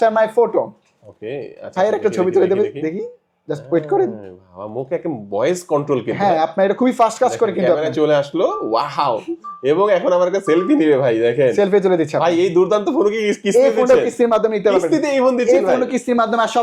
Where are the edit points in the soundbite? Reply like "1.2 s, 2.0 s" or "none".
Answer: none